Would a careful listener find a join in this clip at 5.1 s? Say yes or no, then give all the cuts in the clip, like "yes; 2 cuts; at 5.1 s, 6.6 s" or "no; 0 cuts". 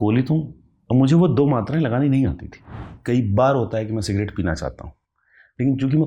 no; 1 cut; at 2.9 s